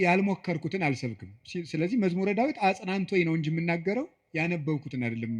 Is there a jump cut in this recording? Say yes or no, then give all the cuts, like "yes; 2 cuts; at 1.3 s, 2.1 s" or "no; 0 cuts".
no; 0 cuts